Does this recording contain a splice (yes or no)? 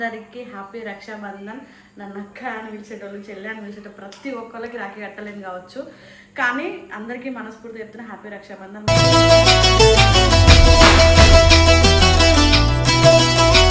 no